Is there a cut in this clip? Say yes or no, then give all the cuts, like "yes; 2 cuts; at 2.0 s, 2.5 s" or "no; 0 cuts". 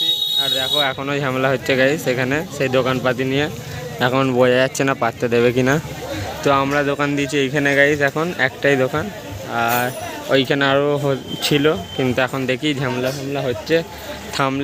no; 0 cuts